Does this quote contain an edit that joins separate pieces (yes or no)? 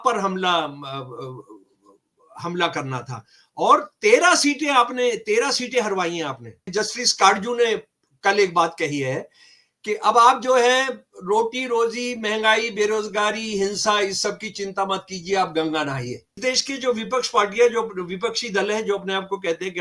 yes